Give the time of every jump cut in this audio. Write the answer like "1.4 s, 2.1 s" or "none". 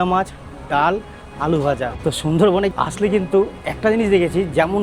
1.9 s, 2.7 s